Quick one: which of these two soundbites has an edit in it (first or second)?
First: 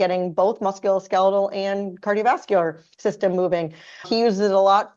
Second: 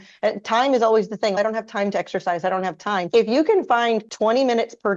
second